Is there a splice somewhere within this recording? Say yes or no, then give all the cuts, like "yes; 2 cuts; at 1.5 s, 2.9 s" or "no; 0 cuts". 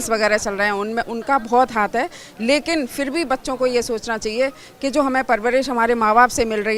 no; 0 cuts